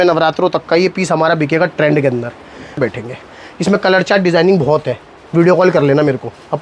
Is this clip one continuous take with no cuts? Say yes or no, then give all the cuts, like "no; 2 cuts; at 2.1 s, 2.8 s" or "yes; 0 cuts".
no; 1 cut; at 2.8 s